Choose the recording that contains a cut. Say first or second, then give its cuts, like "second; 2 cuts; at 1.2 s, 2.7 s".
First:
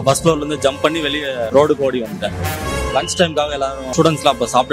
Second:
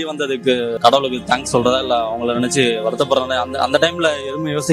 first; 3 cuts; at 1.4 s, 2.6 s, 3.8 s